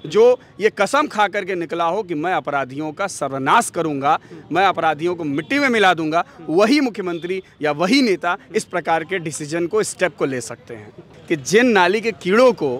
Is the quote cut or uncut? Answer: cut